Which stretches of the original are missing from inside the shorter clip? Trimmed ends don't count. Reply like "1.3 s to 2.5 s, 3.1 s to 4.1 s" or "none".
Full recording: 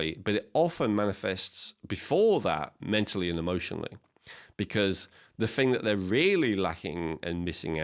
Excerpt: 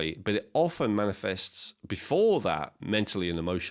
none